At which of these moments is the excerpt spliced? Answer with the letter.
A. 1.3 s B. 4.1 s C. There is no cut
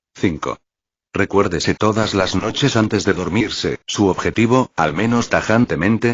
C